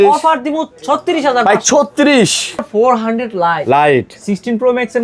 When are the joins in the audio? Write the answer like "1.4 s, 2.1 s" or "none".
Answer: 2.7 s